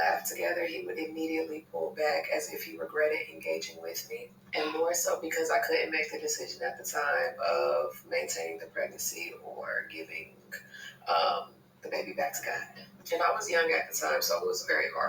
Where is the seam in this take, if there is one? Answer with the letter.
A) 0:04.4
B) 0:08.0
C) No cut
A